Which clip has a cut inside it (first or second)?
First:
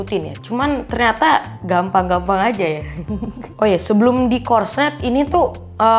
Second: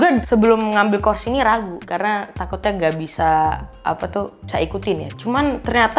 first